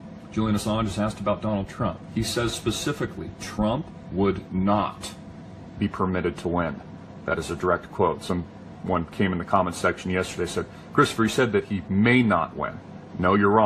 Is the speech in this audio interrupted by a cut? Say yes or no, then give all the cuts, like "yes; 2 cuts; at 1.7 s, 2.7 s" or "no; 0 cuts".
no; 0 cuts